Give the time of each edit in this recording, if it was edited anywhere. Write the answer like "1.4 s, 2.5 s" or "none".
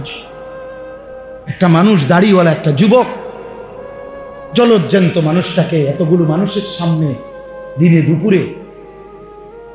8.6 s

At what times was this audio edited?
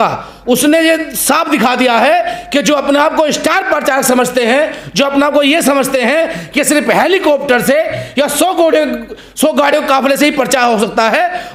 none

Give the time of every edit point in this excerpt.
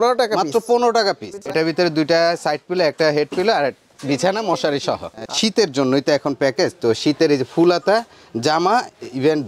1.5 s, 5.3 s

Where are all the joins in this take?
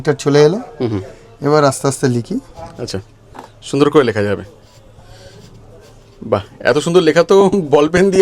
none

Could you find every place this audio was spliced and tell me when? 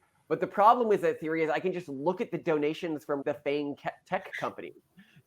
3.2 s

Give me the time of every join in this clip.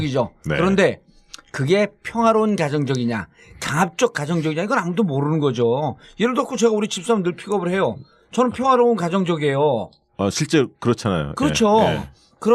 7.4 s

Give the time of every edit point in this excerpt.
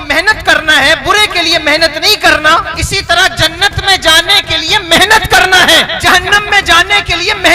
2.8 s, 5.9 s

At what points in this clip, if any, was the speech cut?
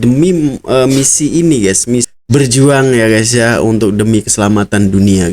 2.2 s

